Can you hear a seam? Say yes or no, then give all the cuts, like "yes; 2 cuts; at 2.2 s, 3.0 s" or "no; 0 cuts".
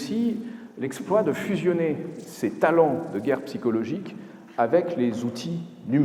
no; 0 cuts